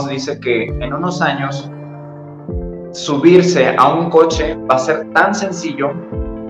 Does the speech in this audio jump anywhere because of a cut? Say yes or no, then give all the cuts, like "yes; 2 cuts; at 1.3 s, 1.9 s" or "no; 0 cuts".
no; 0 cuts